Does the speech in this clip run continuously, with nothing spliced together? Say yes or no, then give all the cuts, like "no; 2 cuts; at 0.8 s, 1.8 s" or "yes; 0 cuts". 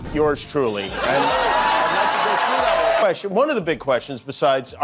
no; 1 cut; at 3.0 s